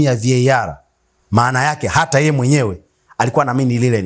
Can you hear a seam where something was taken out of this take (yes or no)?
yes